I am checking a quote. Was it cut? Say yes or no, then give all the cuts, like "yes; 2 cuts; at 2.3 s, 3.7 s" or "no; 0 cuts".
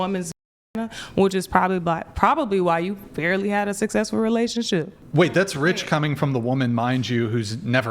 yes; 1 cut; at 5.0 s